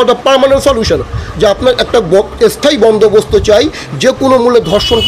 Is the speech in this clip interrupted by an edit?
no; 0 cuts

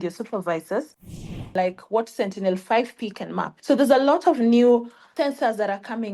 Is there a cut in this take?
yes; 3 cuts; at 1.5 s, 3.5 s, 5.0 s

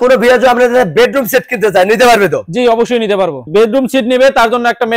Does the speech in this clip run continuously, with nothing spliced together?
no; 1 cut; at 3.4 s

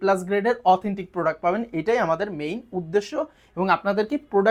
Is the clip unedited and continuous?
yes; 0 cuts

